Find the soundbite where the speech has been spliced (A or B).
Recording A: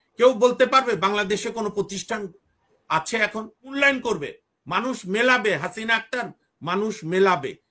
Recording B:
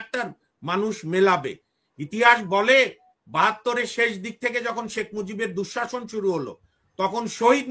A